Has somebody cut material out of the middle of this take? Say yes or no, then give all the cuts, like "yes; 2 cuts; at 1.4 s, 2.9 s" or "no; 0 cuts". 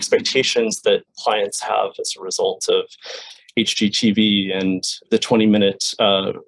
yes; 2 cuts; at 1.1 s, 5.0 s